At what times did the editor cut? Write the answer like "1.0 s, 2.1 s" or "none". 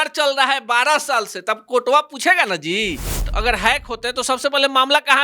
3.3 s